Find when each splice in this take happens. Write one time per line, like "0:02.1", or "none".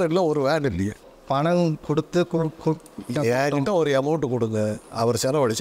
none